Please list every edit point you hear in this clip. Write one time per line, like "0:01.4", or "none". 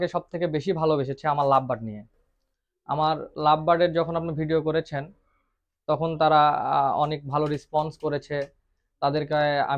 none